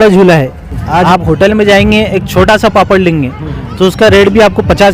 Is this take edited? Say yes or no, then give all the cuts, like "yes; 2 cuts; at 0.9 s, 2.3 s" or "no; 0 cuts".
yes; 1 cut; at 1.0 s